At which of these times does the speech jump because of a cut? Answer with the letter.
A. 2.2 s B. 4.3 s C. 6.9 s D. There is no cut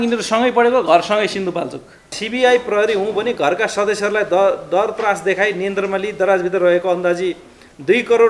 A